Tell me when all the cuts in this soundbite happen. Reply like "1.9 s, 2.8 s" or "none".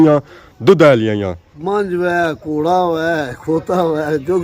1.5 s